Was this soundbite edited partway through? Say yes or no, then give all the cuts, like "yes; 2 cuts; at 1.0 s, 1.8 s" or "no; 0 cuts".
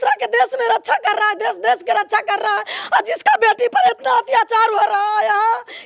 no; 0 cuts